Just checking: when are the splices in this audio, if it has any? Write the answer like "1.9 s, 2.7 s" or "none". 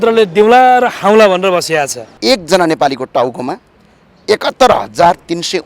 2.0 s